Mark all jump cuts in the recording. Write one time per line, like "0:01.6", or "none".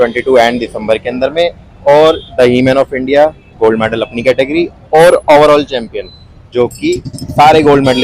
none